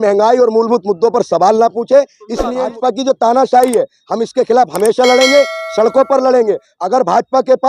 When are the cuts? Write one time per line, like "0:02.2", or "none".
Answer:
0:02.6